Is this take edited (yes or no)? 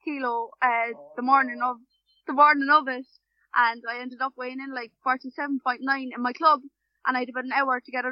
no